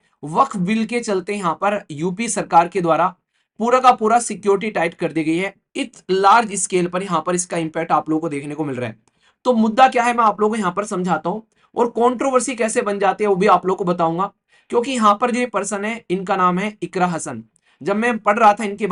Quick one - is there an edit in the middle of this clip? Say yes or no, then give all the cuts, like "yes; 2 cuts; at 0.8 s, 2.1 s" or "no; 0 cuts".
no; 0 cuts